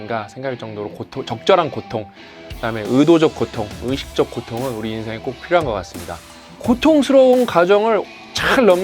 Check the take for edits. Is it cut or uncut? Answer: cut